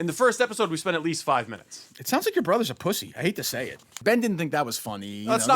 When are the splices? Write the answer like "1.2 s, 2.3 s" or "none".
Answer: 4.0 s